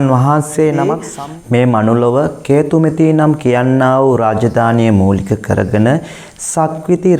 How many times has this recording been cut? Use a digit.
1